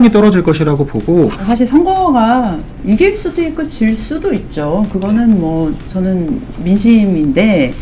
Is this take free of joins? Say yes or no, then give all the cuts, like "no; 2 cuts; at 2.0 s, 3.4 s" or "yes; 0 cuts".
no; 1 cut; at 1.4 s